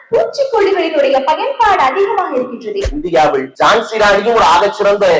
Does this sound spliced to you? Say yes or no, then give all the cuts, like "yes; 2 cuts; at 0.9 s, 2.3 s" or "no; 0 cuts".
yes; 1 cut; at 2.9 s